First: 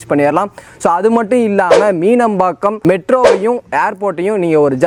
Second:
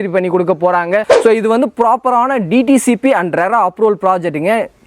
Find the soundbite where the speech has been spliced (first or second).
second